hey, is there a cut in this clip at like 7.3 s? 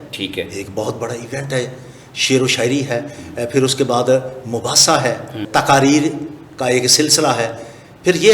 no; 1 cut; at 5.5 s

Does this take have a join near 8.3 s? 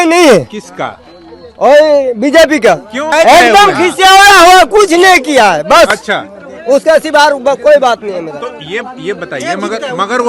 no; 0 cuts

